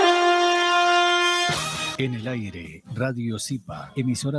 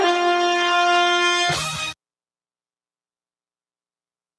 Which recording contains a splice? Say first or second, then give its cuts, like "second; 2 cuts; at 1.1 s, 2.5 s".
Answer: first; 1 cut; at 2.0 s